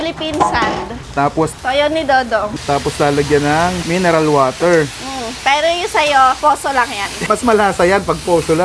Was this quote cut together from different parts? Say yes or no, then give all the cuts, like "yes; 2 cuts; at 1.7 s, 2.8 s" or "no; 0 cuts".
yes; 4 cuts; at 1.5 s, 2.5 s, 3.8 s, 7.2 s